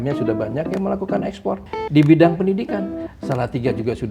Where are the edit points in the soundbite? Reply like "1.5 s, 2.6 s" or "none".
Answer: 1.7 s